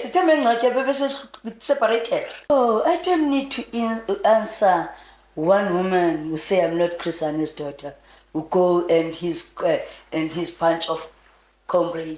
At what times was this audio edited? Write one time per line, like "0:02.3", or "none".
0:02.5